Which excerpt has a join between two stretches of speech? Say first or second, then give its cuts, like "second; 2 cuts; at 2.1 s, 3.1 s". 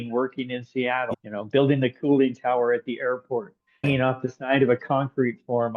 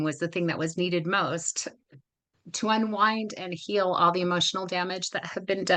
first; 2 cuts; at 1.1 s, 3.8 s